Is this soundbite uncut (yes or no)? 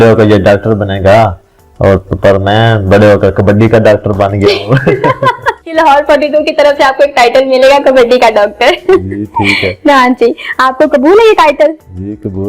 no